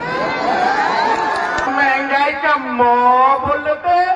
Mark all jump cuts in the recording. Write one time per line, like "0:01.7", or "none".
0:01.7

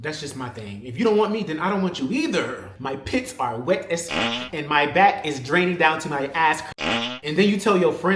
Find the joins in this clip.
0:02.7
0:04.1
0:07.1

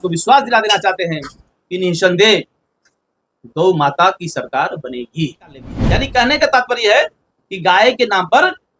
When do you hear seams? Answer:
0:05.7

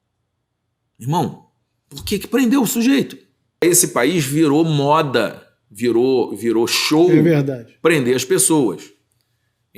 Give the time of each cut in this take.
0:03.6

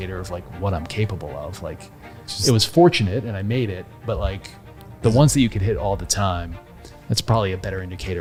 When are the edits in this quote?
none

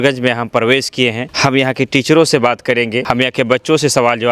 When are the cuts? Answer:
0:01.3
0:03.0

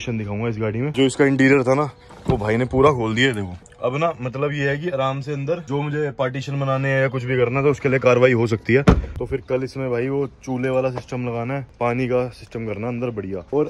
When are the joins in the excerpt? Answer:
0:00.9
0:09.2

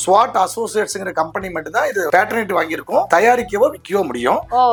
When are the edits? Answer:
none

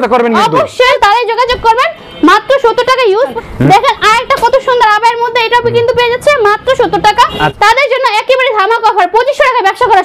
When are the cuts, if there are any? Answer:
0:01.0
0:03.3
0:07.5

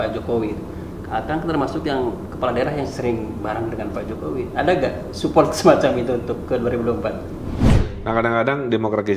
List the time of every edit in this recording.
0:07.7

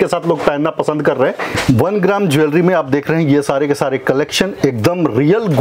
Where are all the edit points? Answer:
0:01.6

